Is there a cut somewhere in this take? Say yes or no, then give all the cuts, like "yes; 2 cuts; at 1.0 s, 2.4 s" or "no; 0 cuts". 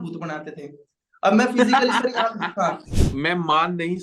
yes; 1 cut; at 2.9 s